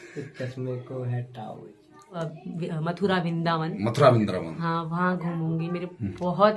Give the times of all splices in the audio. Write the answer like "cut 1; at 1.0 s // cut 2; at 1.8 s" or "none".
cut 1; at 2.2 s